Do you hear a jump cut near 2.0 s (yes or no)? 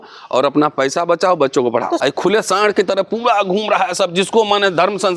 yes